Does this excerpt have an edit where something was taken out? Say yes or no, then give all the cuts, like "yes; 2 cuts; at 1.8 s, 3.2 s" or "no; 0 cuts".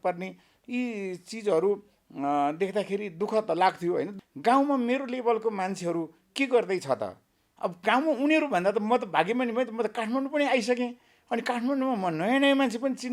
yes; 1 cut; at 4.1 s